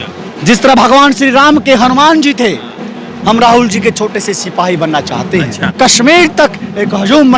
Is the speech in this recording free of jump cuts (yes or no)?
no